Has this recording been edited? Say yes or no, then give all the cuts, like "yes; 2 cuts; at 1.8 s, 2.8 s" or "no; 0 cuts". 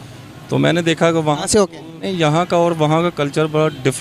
yes; 1 cut; at 2.1 s